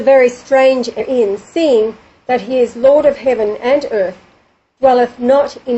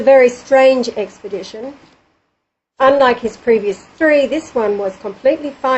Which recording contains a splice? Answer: second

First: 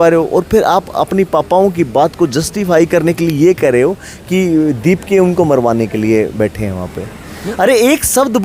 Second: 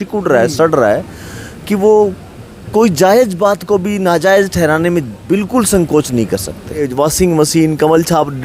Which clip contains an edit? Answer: second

